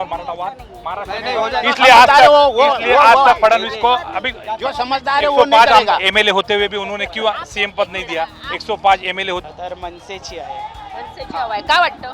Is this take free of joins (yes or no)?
no